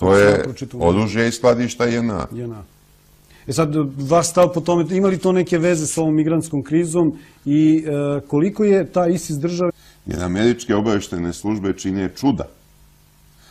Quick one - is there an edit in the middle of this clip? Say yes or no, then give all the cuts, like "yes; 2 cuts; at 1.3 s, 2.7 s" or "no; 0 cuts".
no; 0 cuts